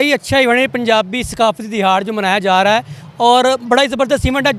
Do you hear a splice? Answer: no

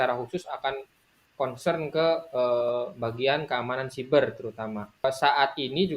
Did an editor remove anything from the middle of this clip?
yes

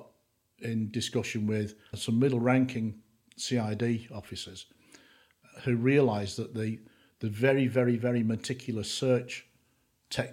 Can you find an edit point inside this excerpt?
yes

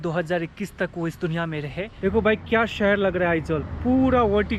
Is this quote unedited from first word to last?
no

